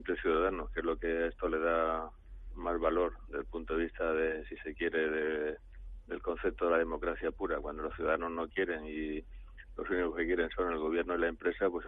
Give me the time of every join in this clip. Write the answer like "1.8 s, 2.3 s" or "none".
none